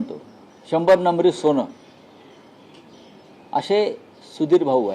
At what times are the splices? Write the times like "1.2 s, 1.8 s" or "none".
none